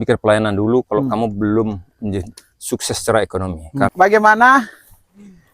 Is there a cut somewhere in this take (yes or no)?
yes